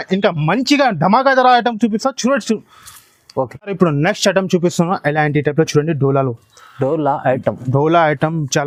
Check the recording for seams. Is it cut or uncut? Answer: uncut